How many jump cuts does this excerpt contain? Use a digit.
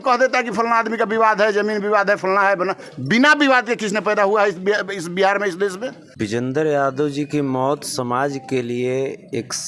1